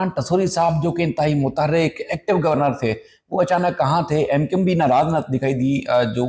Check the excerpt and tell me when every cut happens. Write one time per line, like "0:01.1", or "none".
none

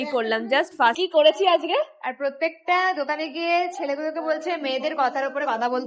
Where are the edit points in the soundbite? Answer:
0:01.0

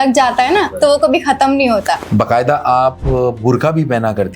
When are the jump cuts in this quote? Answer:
0:02.0

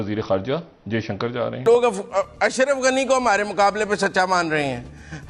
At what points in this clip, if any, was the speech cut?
0:01.6

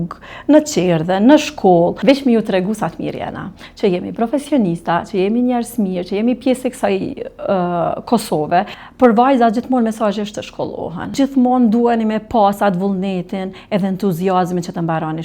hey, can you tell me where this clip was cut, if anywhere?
0:02.0
0:08.8
0:11.2

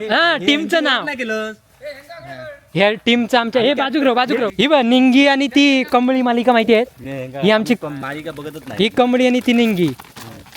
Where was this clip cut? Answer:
0:04.5

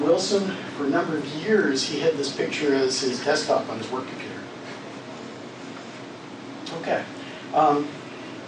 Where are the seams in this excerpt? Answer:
none

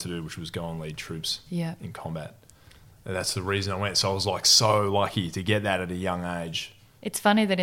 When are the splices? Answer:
none

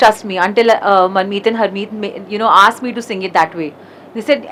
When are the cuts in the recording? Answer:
none

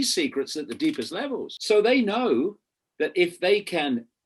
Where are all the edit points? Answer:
0:01.5

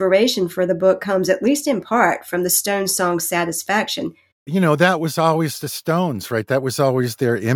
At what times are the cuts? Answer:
0:04.4

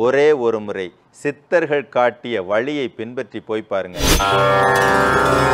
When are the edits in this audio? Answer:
0:04.2

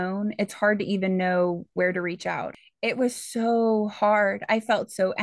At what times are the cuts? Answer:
0:02.4

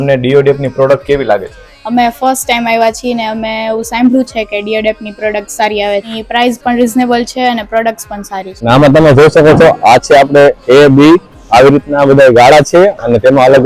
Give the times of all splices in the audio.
0:06.1
0:08.7

